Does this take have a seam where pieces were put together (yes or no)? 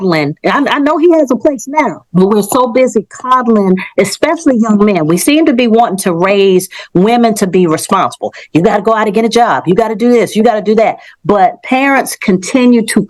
no